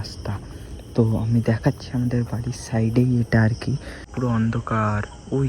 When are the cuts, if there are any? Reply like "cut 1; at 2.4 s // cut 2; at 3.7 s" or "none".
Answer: cut 1; at 4.0 s